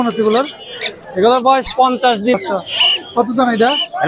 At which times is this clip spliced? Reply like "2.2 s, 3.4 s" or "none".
2.3 s